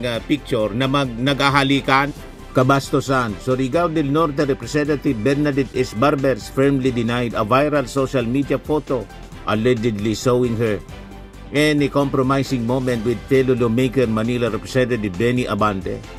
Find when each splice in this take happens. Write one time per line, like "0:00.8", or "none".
none